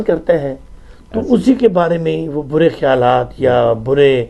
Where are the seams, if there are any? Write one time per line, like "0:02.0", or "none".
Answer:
none